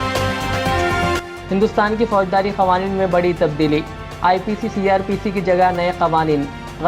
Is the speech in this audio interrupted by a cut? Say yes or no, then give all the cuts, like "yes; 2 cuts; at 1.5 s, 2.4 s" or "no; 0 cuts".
yes; 1 cut; at 1.3 s